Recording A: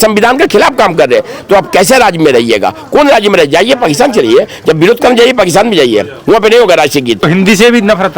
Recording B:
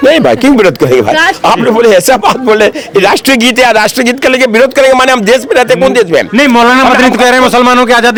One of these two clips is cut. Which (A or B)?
A